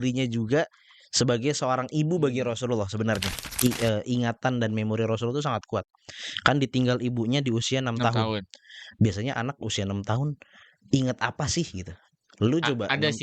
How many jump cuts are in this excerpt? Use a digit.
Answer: 1